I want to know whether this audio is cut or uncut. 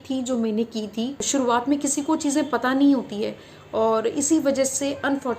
cut